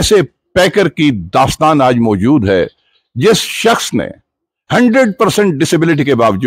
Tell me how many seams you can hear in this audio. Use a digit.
0